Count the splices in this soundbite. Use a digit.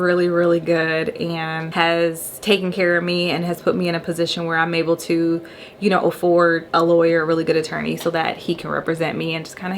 3